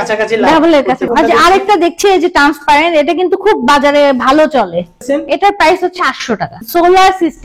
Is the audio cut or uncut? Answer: cut